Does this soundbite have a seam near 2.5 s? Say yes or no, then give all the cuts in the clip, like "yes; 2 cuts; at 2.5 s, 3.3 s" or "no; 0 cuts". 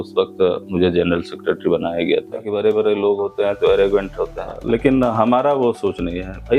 yes; 2 cuts; at 2.5 s, 4.5 s